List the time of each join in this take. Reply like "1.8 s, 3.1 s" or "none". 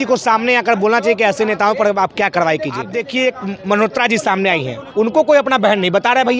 3.0 s